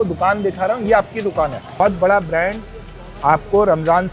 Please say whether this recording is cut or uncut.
cut